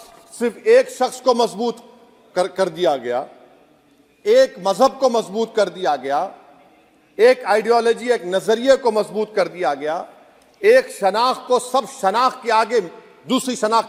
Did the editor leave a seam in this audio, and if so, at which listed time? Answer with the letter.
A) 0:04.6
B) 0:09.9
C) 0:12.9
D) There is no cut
D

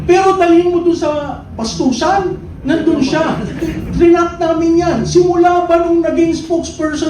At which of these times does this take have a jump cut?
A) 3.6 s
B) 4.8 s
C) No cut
A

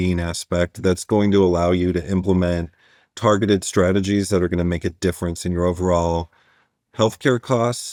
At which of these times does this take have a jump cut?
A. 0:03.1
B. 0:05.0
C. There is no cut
C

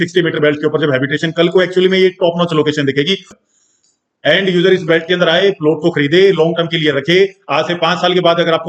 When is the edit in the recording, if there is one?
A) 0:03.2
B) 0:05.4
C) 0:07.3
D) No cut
A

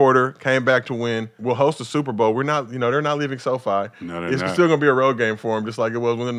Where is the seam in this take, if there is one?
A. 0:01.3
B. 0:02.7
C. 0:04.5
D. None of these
A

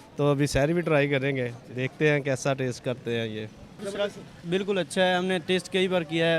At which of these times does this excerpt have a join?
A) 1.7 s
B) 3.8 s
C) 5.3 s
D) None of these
B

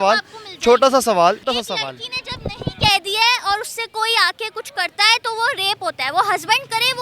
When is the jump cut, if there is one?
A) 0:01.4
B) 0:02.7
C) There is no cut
A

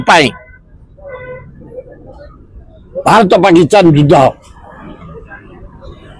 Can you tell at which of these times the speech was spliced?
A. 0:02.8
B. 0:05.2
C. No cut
C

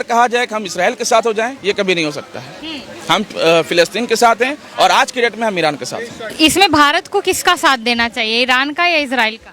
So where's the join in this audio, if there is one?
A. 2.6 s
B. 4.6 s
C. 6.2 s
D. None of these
C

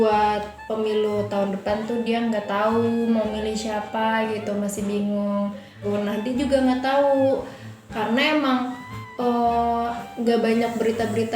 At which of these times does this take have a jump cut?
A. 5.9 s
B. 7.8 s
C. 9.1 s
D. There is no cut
A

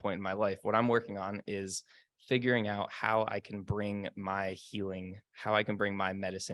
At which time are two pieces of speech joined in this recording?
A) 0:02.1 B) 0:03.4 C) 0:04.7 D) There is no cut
D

